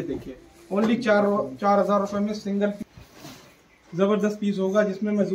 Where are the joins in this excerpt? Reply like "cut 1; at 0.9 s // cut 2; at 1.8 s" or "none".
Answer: cut 1; at 2.8 s